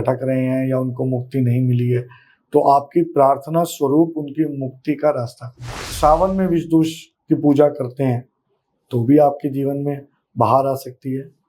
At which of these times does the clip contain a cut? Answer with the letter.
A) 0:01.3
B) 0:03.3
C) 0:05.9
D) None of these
C